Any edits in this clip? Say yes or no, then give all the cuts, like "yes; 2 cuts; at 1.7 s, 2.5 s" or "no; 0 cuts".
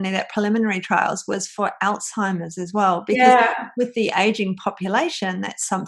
no; 0 cuts